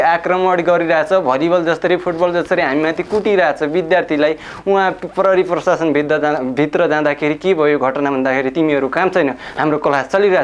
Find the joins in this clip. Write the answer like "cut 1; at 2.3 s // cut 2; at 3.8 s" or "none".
none